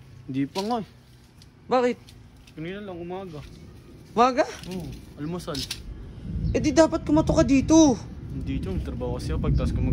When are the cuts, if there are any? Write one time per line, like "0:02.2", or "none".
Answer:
none